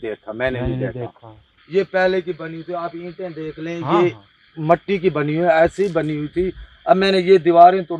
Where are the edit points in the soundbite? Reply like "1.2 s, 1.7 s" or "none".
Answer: none